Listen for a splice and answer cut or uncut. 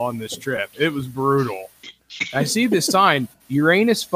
uncut